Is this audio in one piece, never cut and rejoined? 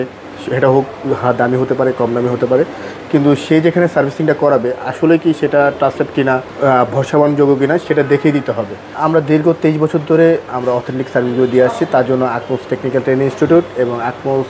no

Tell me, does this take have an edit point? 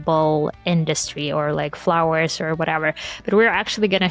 no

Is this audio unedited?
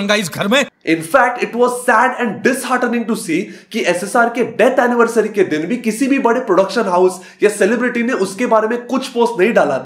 yes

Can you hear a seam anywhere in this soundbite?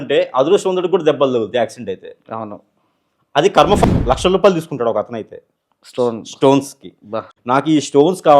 yes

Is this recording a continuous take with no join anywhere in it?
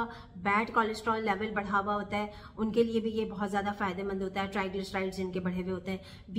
yes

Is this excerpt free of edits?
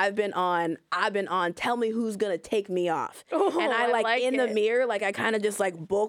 yes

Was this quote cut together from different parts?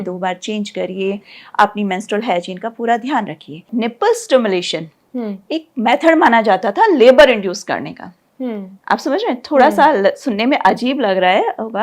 yes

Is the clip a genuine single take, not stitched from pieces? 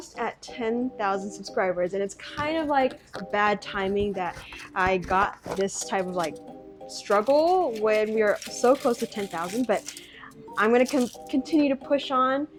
yes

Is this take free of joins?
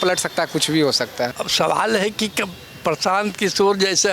no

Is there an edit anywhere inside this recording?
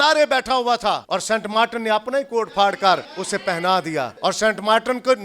yes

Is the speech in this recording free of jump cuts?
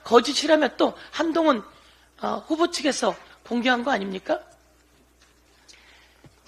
yes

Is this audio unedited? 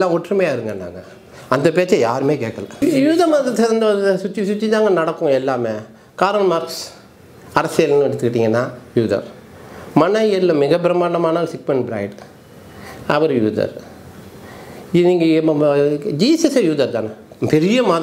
no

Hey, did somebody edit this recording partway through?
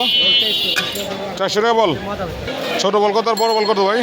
yes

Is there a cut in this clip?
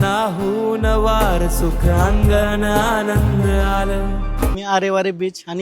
yes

